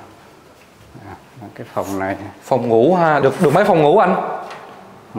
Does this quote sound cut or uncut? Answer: uncut